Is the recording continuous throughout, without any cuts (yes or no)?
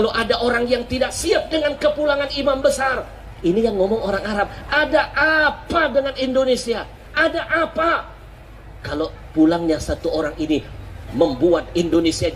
yes